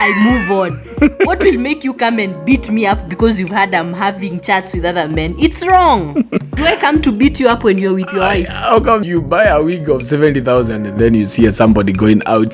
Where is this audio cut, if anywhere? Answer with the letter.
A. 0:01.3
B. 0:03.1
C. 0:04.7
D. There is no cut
D